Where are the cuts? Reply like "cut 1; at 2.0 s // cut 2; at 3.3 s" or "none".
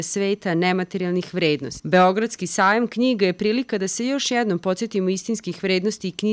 cut 1; at 1.7 s